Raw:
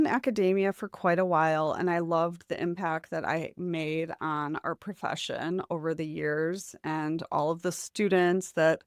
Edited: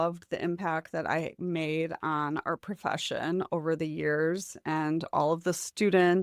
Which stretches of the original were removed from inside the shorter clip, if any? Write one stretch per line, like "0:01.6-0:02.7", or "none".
none